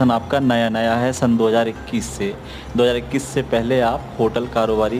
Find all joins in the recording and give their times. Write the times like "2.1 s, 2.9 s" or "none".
none